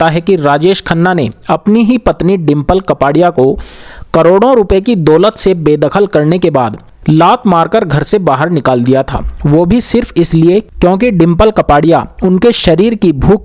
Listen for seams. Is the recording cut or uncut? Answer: uncut